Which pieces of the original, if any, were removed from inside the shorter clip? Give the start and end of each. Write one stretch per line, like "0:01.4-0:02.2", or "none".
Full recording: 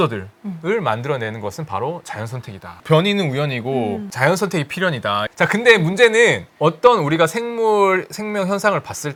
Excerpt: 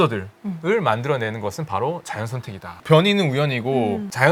none